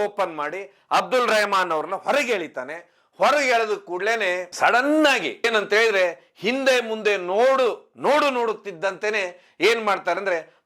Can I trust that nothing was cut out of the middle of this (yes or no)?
no